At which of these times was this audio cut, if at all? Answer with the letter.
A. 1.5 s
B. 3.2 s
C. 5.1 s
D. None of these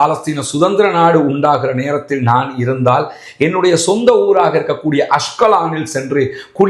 D